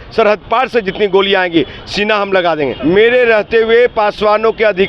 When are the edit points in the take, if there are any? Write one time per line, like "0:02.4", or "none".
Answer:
0:02.8